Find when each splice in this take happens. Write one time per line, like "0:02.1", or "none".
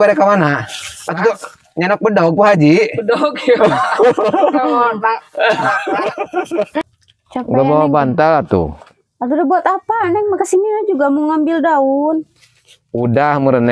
0:06.8